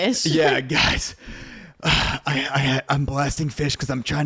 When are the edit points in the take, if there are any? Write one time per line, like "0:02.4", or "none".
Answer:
none